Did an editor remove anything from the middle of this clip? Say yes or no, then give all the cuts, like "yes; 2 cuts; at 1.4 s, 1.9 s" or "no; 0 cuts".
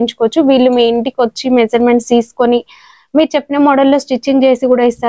no; 0 cuts